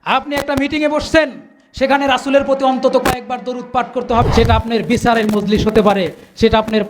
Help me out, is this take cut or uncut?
cut